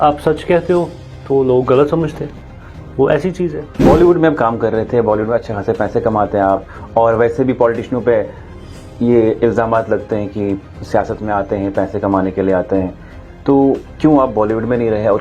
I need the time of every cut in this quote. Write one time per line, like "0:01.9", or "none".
0:03.6